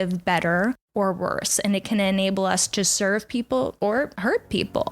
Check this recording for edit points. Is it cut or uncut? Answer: cut